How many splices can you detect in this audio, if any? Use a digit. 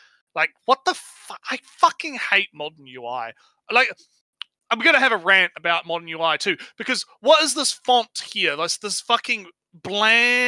0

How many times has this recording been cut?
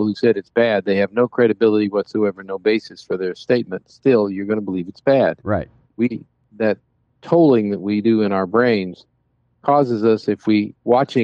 1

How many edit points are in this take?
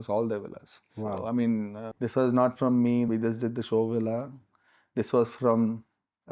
2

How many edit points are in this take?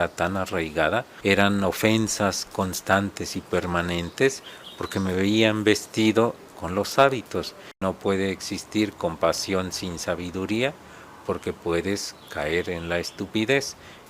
2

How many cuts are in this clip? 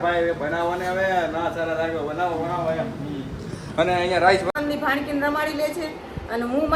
1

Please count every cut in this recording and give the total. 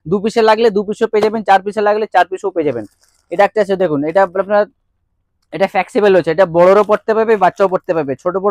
0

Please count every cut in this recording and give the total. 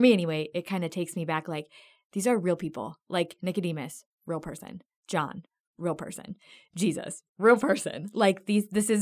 0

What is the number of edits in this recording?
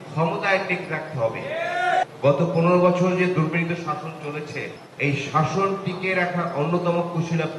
2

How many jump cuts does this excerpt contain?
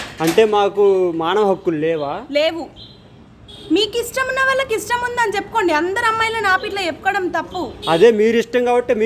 0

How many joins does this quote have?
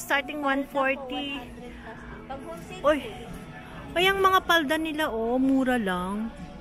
0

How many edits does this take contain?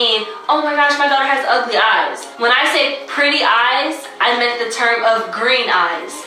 1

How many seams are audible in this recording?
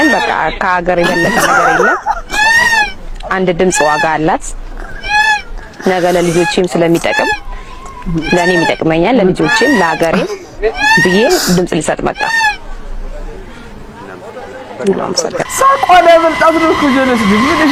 0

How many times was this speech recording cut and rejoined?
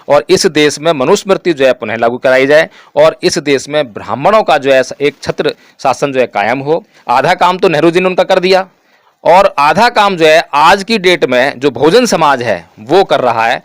1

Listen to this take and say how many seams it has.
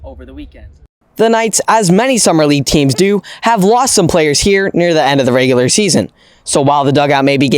1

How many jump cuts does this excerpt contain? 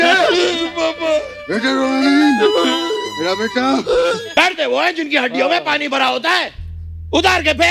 1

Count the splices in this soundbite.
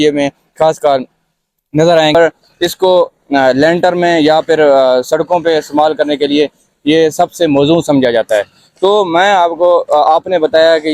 1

